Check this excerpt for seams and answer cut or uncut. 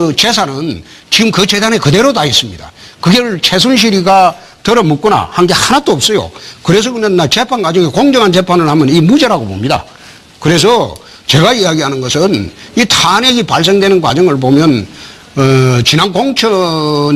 uncut